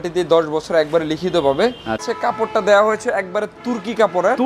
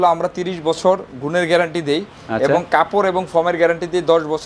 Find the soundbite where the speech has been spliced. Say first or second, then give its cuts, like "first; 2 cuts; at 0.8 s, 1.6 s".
first; 1 cut; at 2.1 s